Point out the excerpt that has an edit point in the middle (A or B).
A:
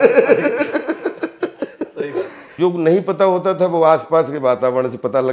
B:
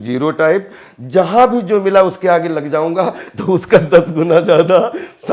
A